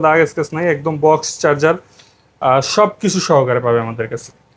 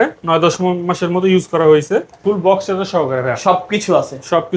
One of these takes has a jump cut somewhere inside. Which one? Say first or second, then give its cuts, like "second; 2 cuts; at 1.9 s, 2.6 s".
second; 1 cut; at 2.2 s